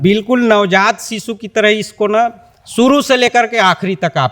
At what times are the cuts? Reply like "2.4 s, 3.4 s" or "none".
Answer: none